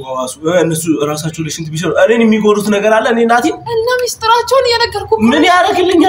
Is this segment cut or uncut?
uncut